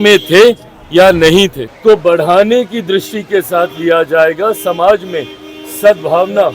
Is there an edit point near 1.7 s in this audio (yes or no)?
yes